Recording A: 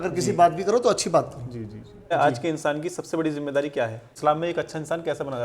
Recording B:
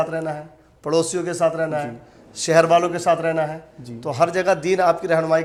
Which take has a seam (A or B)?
A